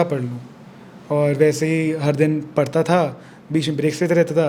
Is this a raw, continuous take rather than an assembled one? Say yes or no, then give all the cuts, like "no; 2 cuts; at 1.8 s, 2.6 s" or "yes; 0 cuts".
yes; 0 cuts